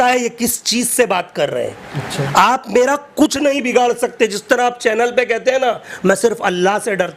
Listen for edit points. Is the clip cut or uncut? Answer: uncut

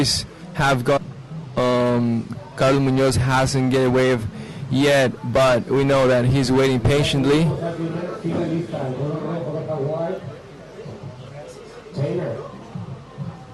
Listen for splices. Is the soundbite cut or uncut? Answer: uncut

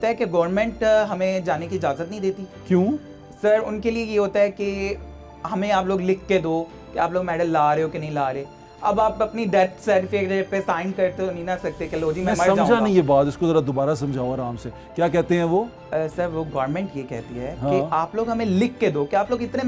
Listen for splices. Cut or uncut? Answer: uncut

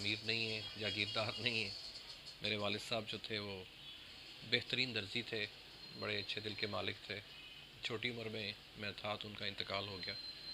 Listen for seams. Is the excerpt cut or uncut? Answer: uncut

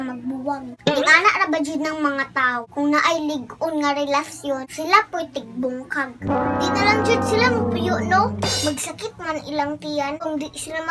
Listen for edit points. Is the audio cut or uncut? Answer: uncut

